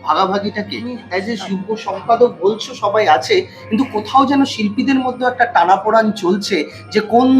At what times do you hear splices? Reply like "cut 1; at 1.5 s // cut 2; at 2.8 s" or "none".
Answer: cut 1; at 1.0 s